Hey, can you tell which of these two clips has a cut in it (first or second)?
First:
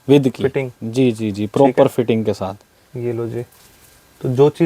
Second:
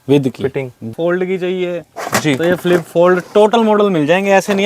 second